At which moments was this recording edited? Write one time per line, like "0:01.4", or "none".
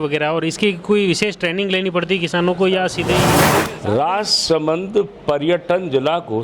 0:03.4

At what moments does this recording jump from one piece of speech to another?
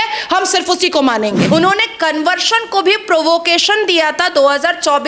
0:01.5

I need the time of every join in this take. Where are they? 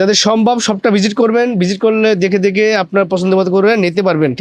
none

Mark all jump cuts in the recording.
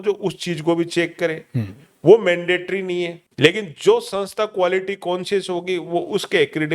0:03.2

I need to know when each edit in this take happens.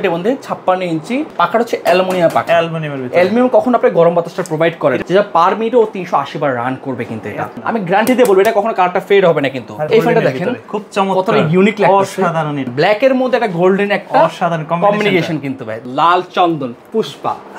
0:01.3
0:05.0
0:07.5
0:09.9
0:12.7
0:15.8

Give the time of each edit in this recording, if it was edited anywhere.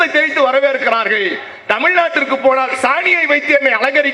none

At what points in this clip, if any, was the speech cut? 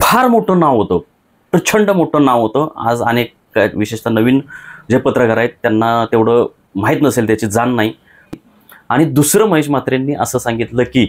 0:08.3

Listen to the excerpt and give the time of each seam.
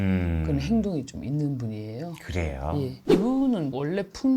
0:03.0

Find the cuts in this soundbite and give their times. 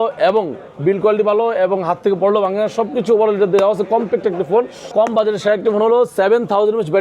0:04.9

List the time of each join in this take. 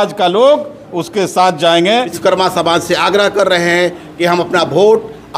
0:02.1

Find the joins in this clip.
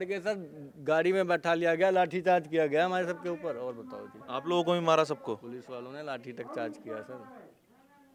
none

